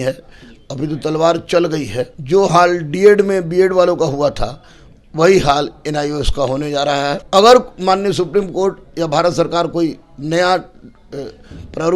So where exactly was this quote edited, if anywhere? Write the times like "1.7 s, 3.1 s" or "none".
2.2 s, 7.2 s

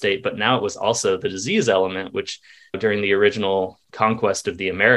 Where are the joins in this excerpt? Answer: none

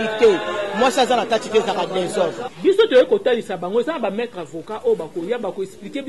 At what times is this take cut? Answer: 2.5 s

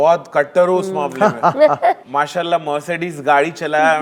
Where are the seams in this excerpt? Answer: 2.0 s

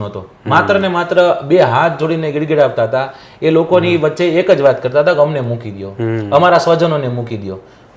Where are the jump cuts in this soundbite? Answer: none

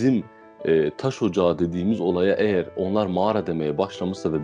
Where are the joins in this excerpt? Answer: none

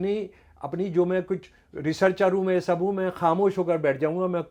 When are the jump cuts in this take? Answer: none

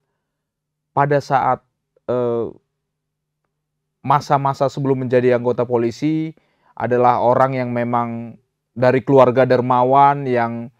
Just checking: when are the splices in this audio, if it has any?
none

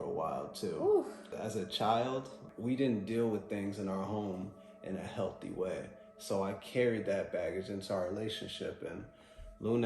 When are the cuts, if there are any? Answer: 1.3 s, 2.4 s

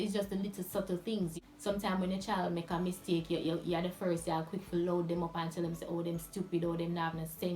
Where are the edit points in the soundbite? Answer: 1.3 s

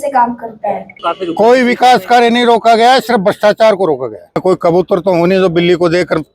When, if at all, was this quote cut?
0.9 s, 4.4 s

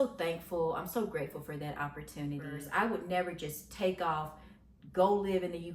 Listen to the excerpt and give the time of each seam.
2.6 s

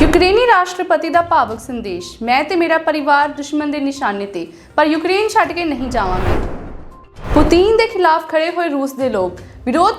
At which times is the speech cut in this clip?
6.2 s

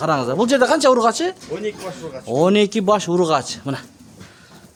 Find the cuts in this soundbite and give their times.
none

